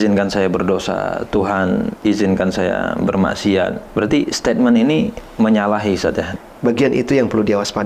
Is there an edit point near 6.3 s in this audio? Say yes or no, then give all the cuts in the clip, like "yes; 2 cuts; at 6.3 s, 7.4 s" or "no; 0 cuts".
yes; 2 cuts; at 3.8 s, 6.3 s